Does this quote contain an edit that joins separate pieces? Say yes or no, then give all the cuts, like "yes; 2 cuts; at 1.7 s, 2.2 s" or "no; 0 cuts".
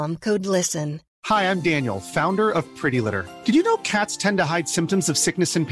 yes; 1 cut; at 1.0 s